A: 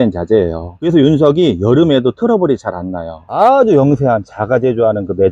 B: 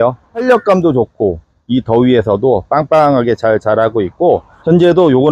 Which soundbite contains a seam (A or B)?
A